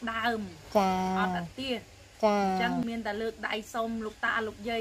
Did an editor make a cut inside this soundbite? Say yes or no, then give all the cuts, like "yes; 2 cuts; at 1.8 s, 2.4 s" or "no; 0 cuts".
yes; 1 cut; at 2.8 s